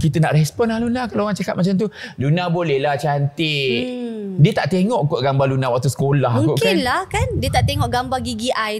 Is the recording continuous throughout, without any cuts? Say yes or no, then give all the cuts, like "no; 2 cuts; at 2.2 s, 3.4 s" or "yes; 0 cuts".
yes; 0 cuts